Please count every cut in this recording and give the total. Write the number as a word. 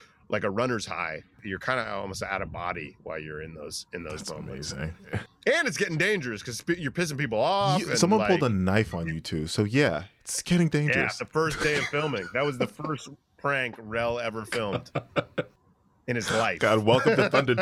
one